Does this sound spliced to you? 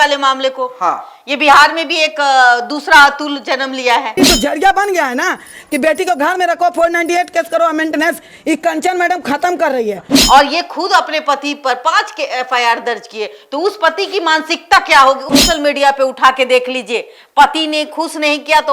yes; 2 cuts; at 4.1 s, 15.3 s

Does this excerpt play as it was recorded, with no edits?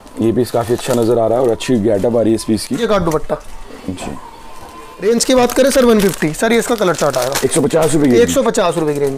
no; 2 cuts; at 2.8 s, 5.0 s

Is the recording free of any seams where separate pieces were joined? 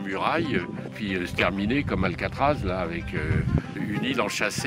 no; 2 cuts; at 0.9 s, 3.7 s

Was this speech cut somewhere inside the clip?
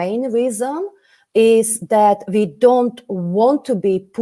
no; 0 cuts

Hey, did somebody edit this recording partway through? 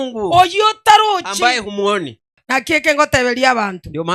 yes; 1 cut; at 2.4 s

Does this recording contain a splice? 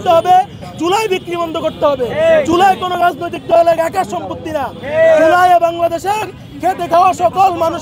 no; 0 cuts

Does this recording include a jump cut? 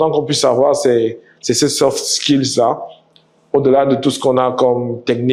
no; 0 cuts

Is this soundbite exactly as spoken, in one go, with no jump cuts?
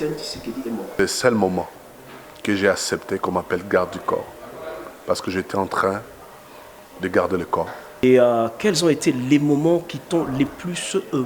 no; 2 cuts; at 1.0 s, 8.0 s

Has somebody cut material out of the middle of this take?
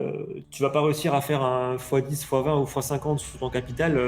no; 0 cuts

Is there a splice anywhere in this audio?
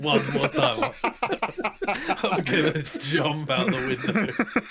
no; 0 cuts

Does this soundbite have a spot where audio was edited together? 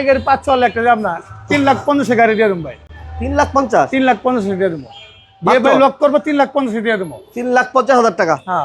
no; 0 cuts

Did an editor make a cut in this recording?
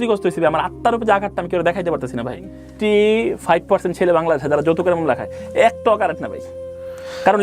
yes; 1 cut; at 2.6 s

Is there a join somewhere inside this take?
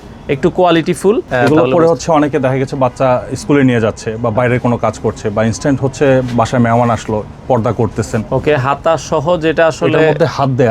yes; 2 cuts; at 1.3 s, 8.2 s

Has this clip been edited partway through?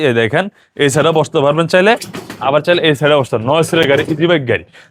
no; 0 cuts

